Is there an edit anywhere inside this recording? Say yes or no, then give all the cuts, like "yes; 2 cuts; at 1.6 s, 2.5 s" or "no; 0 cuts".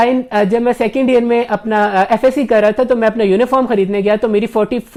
no; 0 cuts